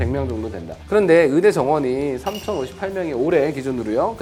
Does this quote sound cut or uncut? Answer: uncut